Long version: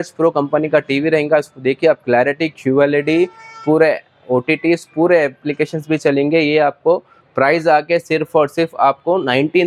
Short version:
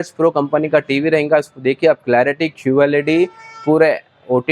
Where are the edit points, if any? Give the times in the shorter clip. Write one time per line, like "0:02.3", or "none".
none